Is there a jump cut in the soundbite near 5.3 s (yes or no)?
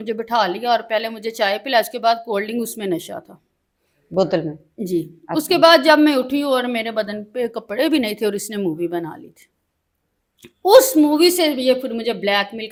no